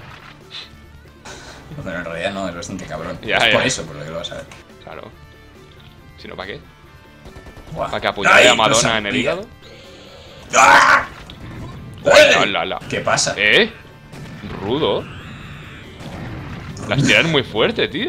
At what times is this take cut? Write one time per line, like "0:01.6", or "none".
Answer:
none